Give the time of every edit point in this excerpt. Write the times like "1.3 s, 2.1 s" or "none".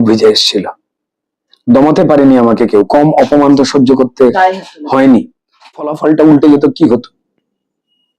5.9 s